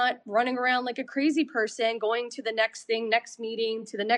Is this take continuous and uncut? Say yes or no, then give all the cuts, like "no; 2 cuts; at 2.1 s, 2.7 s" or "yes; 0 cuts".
yes; 0 cuts